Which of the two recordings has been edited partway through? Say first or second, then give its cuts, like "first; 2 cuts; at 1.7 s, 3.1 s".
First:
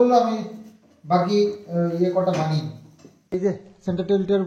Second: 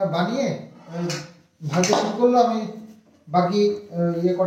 first; 1 cut; at 3.4 s